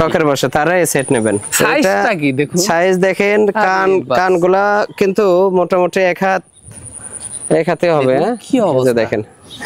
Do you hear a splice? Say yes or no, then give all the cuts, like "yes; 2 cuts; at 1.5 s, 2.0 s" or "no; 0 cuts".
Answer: yes; 1 cut; at 1.5 s